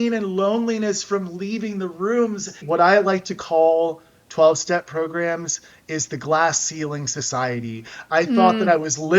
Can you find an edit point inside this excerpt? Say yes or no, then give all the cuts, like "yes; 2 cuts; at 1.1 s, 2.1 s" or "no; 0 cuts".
yes; 1 cut; at 2.5 s